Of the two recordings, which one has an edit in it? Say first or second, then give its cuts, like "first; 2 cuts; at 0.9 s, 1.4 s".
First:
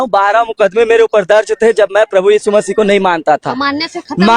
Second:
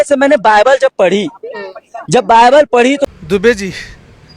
second; 1 cut; at 3.0 s